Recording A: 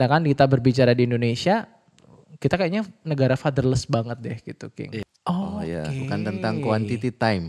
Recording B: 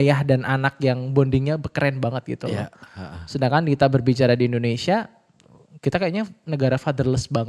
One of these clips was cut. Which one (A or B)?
A